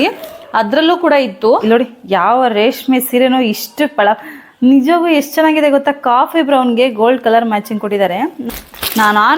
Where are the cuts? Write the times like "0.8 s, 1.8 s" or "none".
1.6 s, 8.4 s